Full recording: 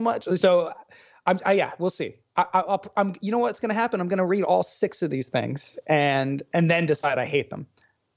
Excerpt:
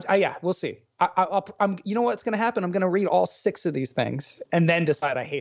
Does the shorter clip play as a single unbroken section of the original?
no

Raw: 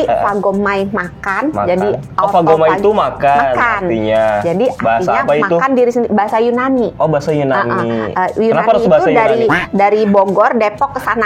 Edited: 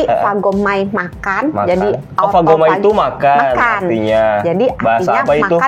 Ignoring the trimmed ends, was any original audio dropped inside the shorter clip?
no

